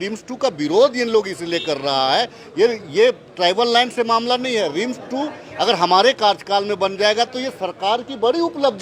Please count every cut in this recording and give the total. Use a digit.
0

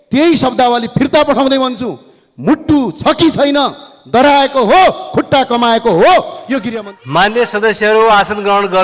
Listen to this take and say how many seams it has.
1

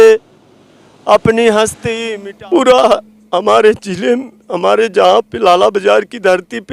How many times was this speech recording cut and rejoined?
1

